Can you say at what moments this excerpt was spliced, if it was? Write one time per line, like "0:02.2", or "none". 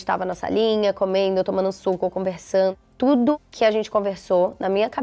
0:02.7
0:03.5